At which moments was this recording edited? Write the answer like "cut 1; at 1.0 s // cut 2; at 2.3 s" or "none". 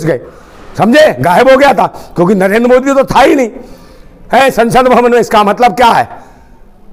none